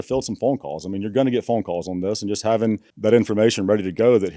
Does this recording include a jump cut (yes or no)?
yes